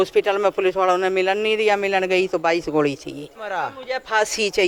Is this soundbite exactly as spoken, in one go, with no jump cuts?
no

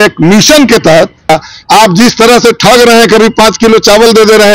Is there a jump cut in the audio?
yes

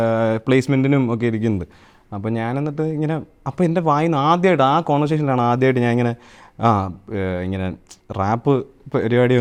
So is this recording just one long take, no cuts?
yes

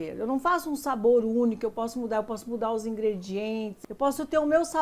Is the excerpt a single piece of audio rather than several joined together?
no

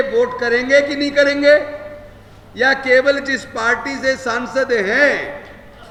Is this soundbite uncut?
yes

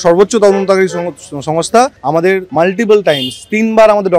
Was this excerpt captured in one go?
no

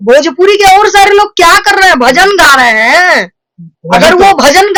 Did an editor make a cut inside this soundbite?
no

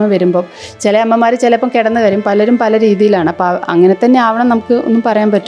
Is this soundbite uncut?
yes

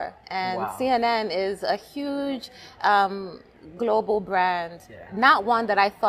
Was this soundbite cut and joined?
no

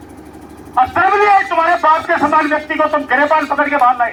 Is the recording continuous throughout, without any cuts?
yes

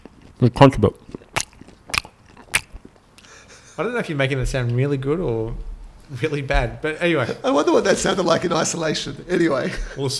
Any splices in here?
no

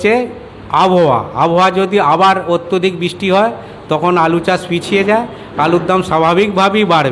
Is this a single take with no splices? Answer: yes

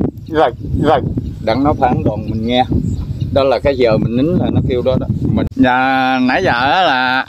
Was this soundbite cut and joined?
yes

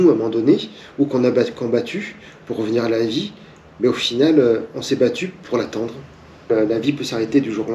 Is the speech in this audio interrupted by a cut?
yes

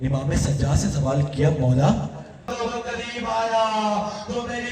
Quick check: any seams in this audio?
yes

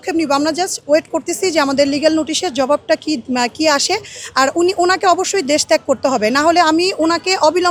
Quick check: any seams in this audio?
no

